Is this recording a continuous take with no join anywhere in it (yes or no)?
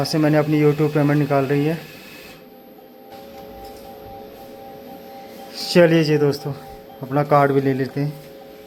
yes